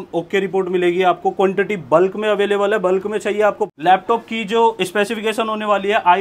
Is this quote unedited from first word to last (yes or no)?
no